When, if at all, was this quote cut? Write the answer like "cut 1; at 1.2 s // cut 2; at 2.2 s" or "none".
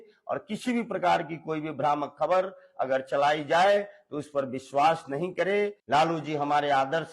cut 1; at 5.8 s